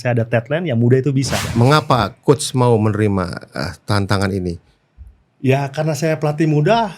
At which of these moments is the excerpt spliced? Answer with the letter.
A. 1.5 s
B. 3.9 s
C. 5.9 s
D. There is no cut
A